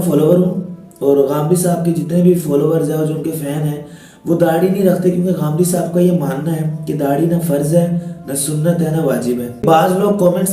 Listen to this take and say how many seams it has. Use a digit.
1